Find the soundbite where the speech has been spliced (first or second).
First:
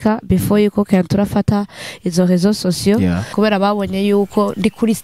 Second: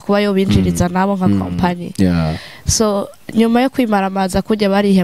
first